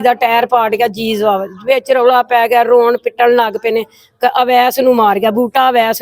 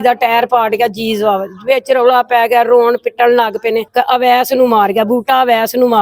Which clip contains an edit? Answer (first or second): second